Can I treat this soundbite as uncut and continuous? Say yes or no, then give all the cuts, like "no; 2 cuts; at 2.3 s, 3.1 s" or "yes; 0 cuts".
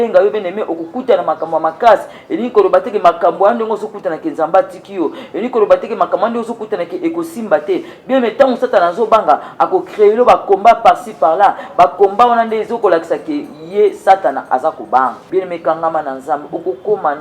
no; 1 cut; at 15.2 s